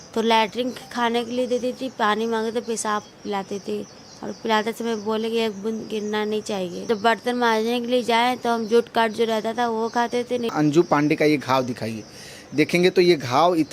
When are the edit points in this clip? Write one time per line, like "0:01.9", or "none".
0:06.8
0:10.5